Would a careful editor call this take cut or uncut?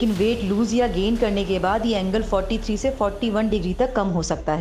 uncut